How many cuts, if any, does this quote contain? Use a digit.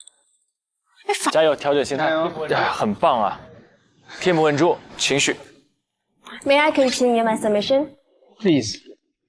1